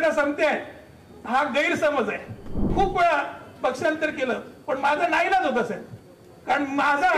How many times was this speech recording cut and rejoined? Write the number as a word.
one